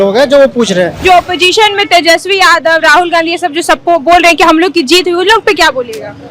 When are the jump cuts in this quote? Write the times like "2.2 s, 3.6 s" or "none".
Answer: 1.0 s